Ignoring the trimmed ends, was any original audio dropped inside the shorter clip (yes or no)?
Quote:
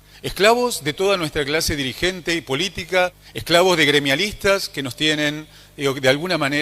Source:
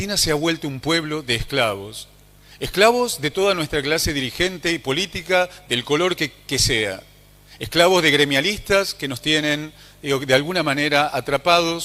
yes